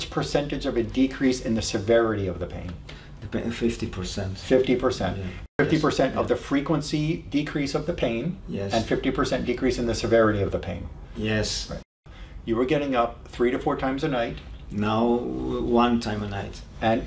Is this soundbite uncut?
no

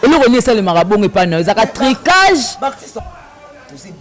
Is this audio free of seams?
no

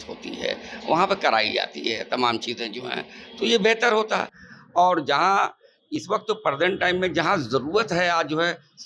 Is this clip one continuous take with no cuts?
yes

